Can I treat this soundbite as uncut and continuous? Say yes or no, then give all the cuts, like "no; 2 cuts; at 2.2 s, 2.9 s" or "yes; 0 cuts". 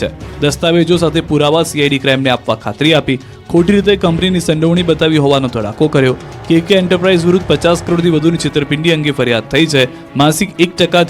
no; 1 cut; at 3.3 s